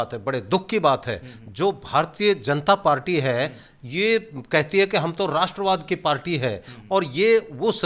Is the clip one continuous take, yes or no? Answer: yes